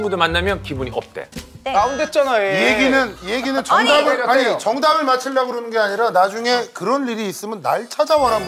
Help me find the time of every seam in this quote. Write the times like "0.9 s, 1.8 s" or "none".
none